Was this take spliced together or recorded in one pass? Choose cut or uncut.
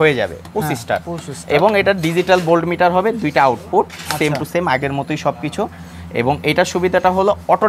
uncut